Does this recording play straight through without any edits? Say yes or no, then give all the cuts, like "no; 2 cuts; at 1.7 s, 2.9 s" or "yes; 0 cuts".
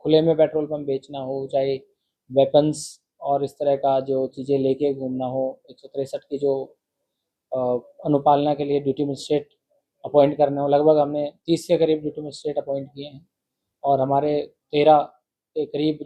yes; 0 cuts